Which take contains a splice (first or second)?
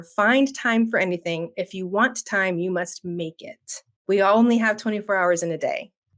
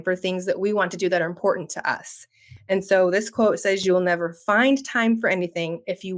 first